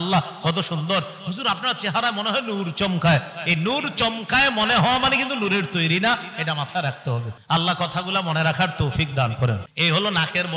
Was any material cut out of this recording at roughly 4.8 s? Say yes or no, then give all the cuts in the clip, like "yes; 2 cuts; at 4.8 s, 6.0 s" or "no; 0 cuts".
no; 2 cuts; at 7.3 s, 9.7 s